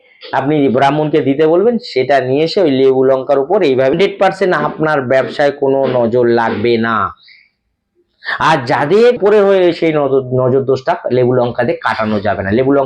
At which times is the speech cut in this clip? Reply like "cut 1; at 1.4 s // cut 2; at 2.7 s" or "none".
cut 1; at 3.9 s // cut 2; at 9.2 s